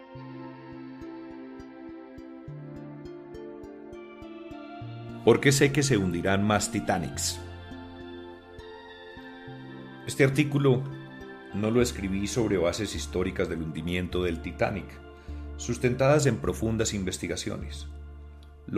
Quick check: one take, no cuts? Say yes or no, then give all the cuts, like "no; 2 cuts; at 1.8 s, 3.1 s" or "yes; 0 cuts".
yes; 0 cuts